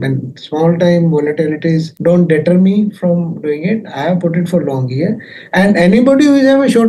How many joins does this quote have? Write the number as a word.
one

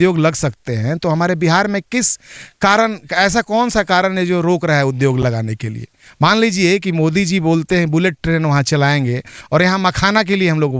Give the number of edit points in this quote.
zero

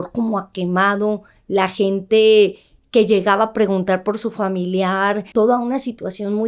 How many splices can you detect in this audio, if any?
one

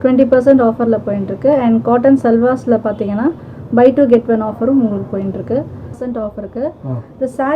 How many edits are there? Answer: one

